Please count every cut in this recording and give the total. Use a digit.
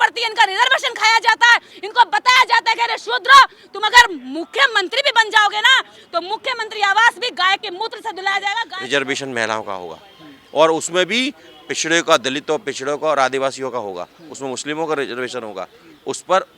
1